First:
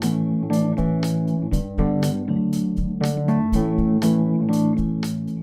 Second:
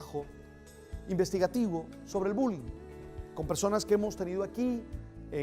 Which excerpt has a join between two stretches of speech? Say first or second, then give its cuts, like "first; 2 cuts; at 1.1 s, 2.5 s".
second; 1 cut; at 3.6 s